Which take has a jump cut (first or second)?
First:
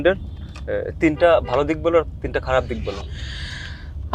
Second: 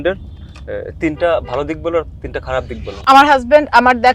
second